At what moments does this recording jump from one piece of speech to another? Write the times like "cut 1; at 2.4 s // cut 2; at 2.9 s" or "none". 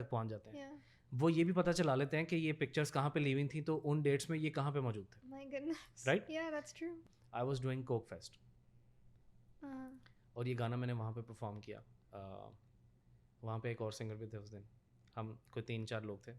cut 1; at 7.0 s